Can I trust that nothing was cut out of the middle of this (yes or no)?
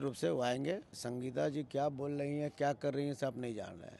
no